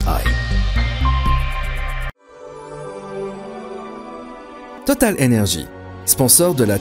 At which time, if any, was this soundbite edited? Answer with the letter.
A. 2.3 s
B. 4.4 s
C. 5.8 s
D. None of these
A